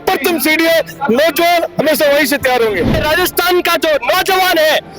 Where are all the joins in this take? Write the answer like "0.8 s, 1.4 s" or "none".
3.0 s